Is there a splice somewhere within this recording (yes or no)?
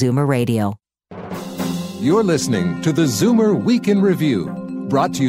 yes